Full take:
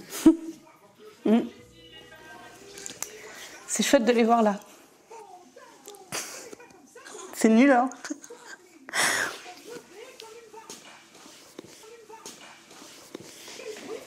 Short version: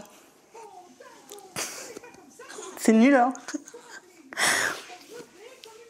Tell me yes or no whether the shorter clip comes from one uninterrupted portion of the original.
yes